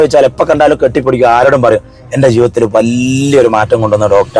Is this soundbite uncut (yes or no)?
yes